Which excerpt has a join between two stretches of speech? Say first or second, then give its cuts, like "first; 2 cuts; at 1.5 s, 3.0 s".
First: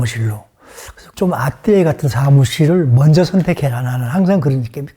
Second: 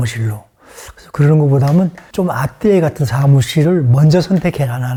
first; 1 cut; at 1.0 s